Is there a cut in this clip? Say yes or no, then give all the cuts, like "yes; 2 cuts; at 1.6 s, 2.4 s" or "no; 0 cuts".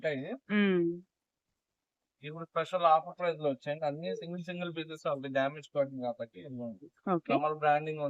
no; 0 cuts